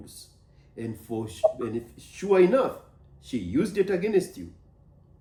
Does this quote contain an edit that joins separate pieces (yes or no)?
no